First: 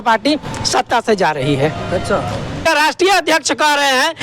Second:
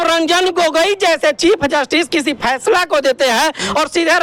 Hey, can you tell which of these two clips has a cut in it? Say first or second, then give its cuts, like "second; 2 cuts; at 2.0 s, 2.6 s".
first; 1 cut; at 2.6 s